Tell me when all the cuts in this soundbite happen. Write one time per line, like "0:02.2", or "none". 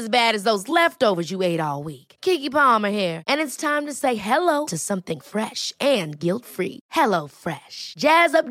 none